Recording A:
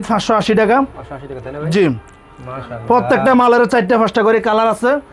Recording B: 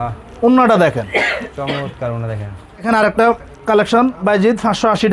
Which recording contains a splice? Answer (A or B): B